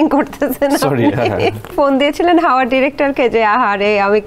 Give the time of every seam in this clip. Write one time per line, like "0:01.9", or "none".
0:01.7